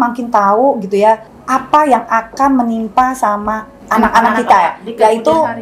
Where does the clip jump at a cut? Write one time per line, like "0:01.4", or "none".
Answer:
0:01.3
0:03.7